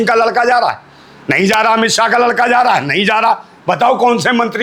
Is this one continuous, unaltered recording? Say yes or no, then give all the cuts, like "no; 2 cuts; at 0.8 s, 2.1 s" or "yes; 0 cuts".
yes; 0 cuts